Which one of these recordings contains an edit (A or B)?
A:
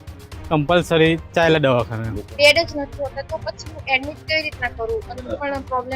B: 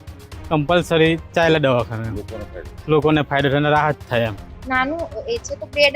A